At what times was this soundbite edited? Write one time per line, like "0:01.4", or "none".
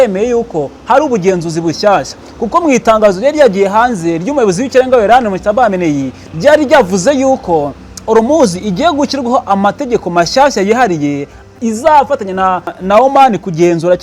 0:12.7

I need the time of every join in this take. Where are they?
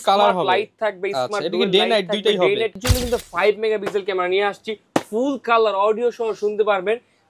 0:02.8

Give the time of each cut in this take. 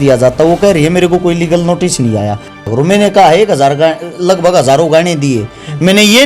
0:02.7

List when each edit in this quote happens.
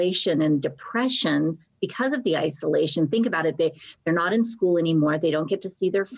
none

